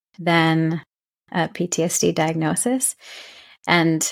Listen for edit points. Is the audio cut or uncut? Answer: uncut